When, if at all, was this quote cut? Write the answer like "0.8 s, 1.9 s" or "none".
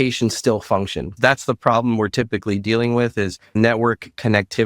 1.1 s, 3.5 s